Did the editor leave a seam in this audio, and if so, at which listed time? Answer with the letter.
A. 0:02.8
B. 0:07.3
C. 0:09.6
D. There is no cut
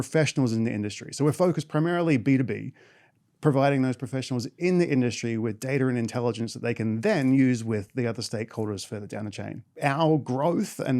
C